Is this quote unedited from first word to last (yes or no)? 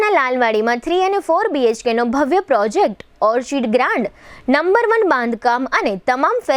yes